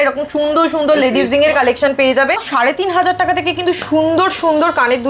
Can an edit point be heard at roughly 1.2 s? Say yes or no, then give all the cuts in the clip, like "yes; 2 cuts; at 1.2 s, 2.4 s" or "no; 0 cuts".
no; 1 cut; at 2.5 s